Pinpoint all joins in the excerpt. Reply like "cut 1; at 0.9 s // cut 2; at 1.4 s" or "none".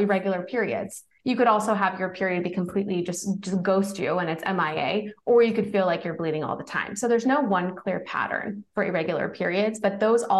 cut 1; at 1.1 s